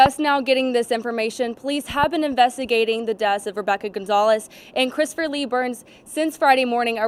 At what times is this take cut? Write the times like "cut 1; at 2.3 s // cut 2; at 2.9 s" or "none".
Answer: none